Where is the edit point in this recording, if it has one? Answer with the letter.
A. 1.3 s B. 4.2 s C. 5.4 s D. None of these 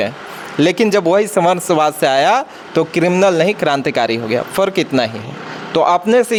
D